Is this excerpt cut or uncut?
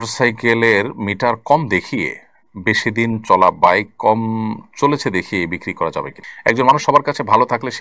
cut